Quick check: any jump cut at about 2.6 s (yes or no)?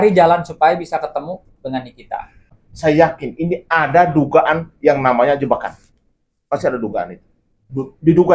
yes